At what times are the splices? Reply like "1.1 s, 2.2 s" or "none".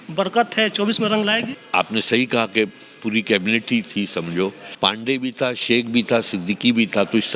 1.6 s, 4.6 s